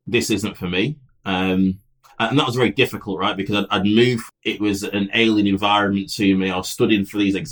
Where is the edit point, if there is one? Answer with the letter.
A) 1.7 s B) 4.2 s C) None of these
B